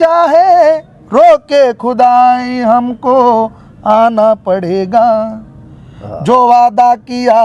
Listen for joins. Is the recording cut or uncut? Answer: uncut